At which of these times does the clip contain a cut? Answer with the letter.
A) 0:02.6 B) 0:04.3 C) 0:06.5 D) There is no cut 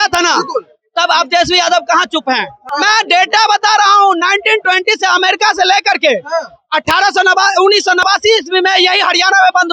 A